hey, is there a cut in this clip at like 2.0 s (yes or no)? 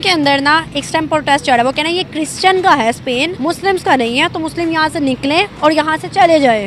no